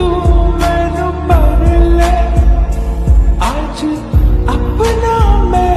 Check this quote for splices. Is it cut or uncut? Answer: uncut